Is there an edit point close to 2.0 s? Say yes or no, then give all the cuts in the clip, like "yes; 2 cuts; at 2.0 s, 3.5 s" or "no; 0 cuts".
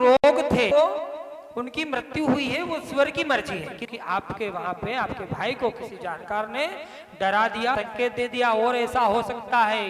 no; 3 cuts; at 0.7 s, 3.9 s, 7.8 s